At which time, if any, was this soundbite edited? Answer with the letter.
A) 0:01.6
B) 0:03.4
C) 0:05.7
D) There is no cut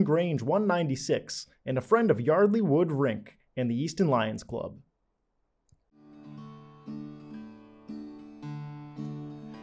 C